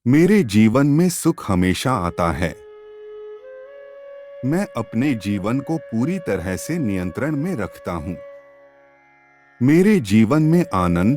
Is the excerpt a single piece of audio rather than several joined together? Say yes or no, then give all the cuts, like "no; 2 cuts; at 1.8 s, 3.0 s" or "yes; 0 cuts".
no; 2 cuts; at 2.5 s, 3.9 s